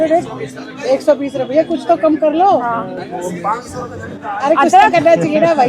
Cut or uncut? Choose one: uncut